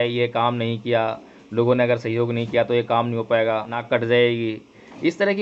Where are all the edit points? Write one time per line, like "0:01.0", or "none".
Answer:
0:03.8